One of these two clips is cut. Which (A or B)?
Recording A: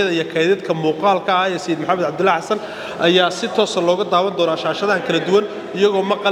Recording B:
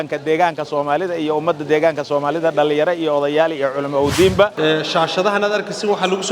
B